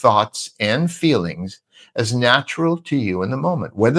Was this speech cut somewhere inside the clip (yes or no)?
no